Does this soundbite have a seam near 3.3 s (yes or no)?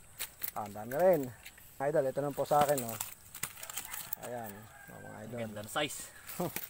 no